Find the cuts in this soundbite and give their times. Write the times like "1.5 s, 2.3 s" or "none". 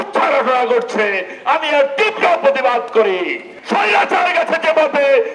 3.5 s